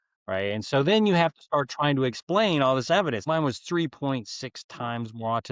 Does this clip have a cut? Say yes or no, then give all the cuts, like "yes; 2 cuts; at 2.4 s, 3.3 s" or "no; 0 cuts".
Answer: yes; 1 cut; at 3.2 s